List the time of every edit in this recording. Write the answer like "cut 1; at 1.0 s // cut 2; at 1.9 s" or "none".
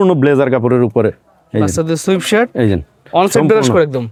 none